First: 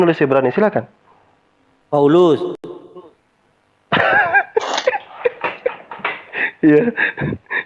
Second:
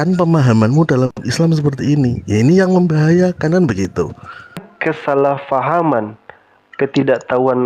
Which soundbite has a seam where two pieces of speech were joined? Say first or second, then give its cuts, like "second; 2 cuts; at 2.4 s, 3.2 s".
second; 1 cut; at 4.7 s